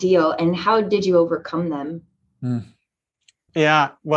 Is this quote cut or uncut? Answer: uncut